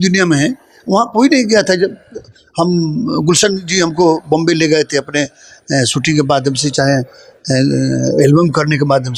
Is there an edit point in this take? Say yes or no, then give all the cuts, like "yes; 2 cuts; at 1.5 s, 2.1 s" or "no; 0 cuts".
no; 0 cuts